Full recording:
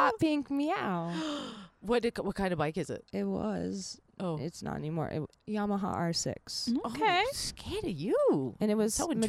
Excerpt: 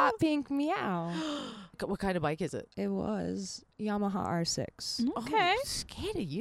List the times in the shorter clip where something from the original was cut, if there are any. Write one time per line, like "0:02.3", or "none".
0:01.8
0:03.7